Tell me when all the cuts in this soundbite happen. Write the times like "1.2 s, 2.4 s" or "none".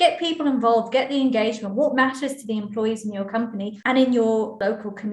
3.7 s